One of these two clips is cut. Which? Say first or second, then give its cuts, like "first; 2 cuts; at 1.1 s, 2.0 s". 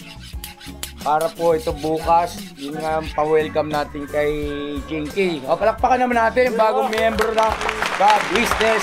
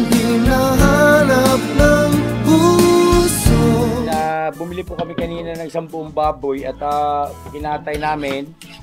second; 1 cut; at 4.1 s